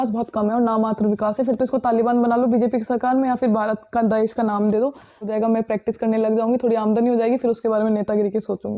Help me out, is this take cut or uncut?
cut